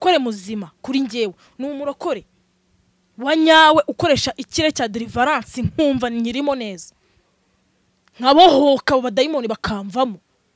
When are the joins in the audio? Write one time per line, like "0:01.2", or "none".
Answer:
none